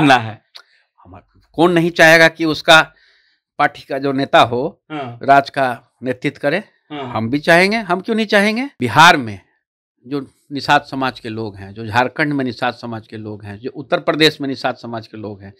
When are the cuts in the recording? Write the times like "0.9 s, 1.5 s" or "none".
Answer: 8.7 s